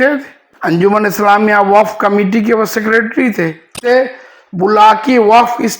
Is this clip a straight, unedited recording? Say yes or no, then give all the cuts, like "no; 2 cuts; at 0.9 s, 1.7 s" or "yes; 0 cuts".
no; 2 cuts; at 0.8 s, 3.9 s